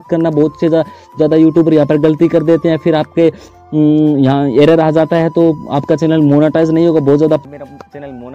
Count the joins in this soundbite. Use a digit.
1